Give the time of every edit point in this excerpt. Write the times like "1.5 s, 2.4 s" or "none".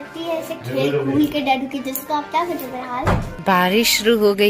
3.3 s